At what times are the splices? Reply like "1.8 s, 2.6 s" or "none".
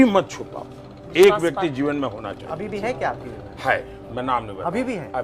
none